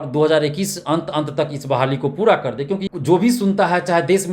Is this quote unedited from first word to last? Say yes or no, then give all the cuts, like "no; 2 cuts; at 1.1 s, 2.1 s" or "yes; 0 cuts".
no; 1 cut; at 2.8 s